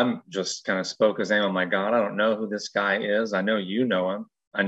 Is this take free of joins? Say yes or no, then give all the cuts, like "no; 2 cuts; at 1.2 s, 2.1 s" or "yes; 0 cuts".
yes; 0 cuts